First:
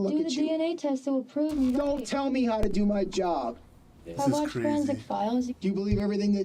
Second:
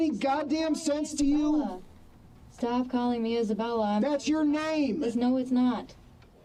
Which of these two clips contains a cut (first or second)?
first